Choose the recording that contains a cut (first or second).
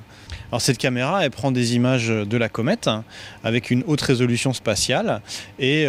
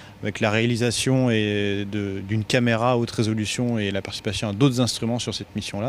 second